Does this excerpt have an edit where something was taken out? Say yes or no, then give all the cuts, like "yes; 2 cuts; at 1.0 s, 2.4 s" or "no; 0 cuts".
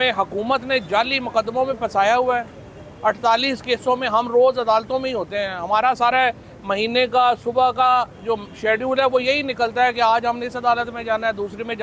no; 0 cuts